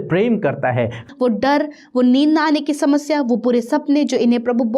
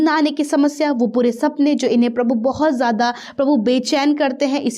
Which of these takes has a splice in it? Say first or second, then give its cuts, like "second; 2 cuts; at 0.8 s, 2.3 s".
first; 1 cut; at 1.1 s